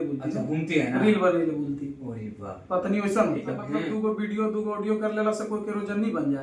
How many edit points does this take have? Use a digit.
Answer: 1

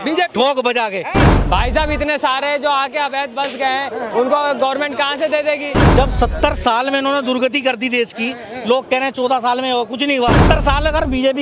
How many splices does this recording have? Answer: 3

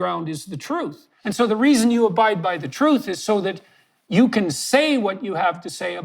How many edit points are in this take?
1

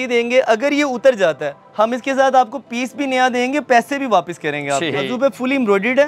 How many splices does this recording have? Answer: 1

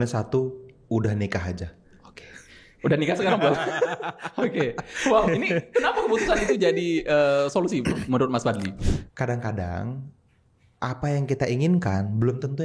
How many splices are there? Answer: 1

